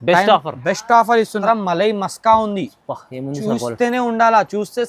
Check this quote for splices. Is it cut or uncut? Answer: cut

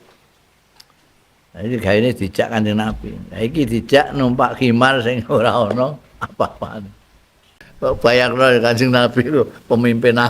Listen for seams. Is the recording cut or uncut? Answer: cut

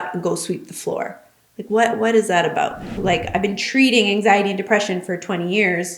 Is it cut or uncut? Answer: cut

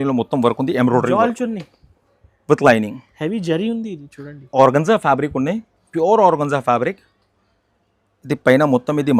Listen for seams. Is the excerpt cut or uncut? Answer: cut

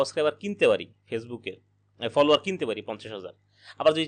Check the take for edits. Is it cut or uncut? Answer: uncut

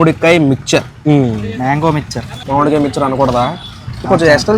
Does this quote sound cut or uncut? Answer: uncut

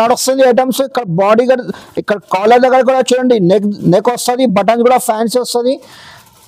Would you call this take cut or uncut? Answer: uncut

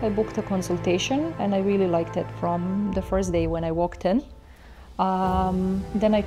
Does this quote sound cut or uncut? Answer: uncut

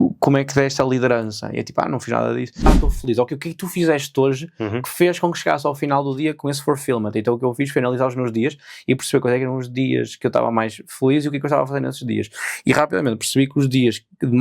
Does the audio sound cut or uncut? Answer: cut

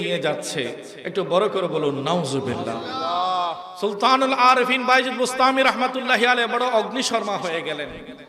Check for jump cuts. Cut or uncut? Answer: cut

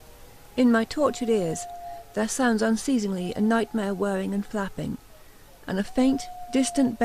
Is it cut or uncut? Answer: uncut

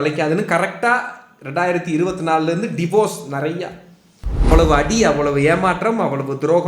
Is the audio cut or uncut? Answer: cut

